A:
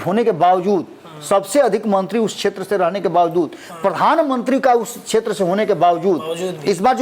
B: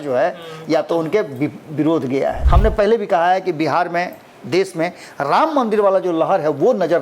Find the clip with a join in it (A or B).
B